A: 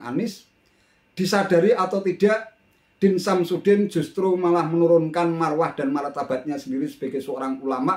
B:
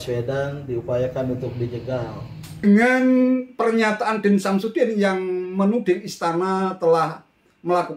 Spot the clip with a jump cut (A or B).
B